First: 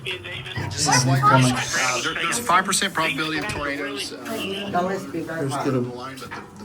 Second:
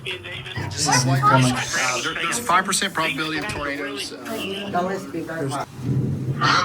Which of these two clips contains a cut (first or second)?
second